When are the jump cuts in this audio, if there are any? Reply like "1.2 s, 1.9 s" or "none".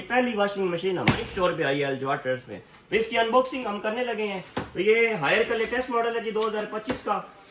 none